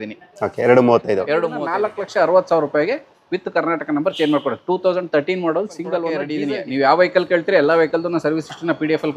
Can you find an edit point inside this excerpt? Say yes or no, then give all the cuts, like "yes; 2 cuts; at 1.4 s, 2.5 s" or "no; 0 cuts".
yes; 2 cuts; at 1.6 s, 6.4 s